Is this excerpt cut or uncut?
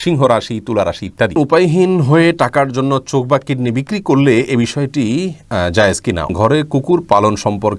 cut